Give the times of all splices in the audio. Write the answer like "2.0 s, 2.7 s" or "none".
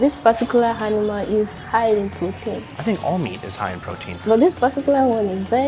2.7 s, 4.1 s